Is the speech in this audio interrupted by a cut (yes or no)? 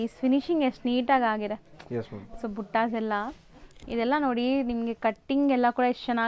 no